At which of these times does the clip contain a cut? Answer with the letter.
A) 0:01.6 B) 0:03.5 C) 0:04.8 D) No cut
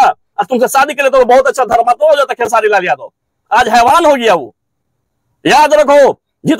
D